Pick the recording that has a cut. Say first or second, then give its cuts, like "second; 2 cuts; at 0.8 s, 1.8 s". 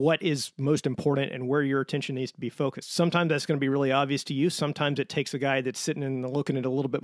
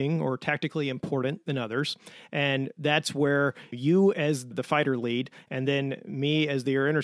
second; 2 cuts; at 3.7 s, 4.5 s